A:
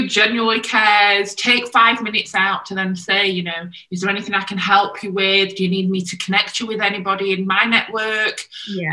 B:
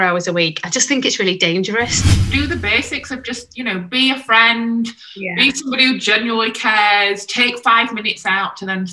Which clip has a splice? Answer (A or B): B